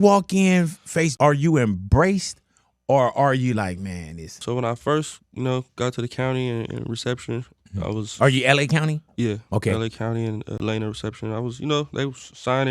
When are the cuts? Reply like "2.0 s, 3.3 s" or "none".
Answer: 1.1 s, 4.4 s, 10.5 s